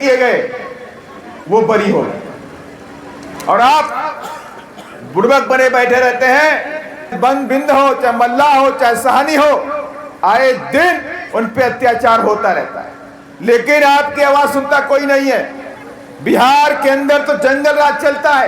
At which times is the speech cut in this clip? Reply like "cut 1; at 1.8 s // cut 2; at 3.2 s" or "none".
cut 1; at 7.1 s